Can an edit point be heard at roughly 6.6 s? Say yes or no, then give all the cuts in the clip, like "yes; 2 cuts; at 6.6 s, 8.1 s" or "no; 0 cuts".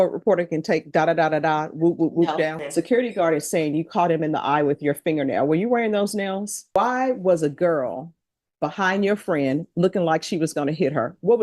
yes; 2 cuts; at 2.6 s, 6.6 s